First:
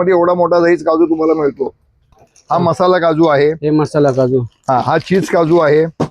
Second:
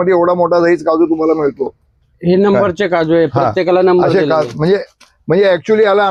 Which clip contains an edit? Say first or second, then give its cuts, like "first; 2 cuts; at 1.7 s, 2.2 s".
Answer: first; 1 cut; at 2.2 s